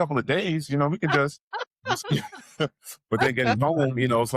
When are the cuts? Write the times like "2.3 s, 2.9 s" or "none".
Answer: 1.6 s